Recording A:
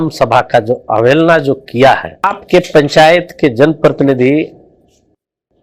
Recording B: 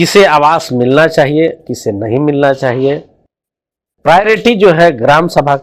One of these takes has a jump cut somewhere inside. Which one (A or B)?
A